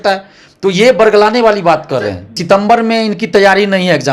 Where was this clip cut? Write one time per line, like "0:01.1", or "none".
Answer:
0:02.4

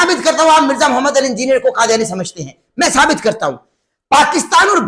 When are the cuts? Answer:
none

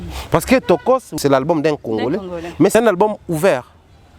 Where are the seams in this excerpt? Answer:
0:01.2
0:02.7

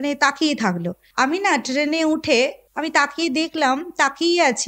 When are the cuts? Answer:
0:01.0
0:02.6

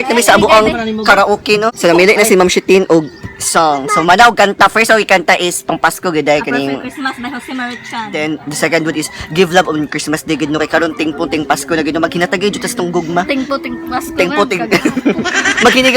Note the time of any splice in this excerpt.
0:01.7

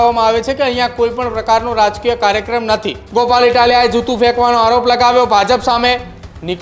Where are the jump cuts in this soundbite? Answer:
0:03.0

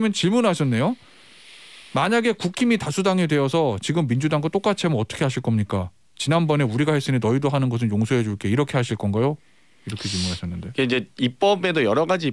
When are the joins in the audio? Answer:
none

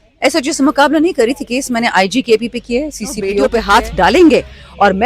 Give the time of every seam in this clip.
0:03.4

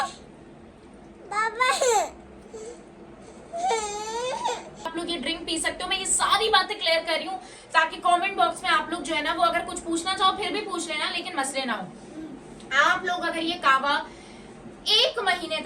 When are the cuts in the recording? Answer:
0:04.9

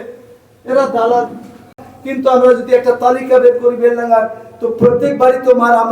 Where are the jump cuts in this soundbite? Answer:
0:01.7

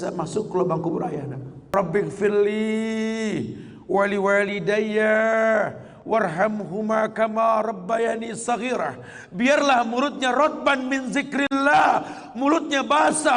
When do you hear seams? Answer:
0:01.7

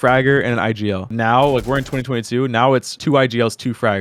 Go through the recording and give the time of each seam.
0:01.1
0:02.9

